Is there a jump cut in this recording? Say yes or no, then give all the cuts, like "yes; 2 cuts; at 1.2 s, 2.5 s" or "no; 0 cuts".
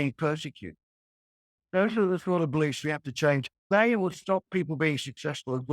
yes; 2 cuts; at 1.5 s, 3.5 s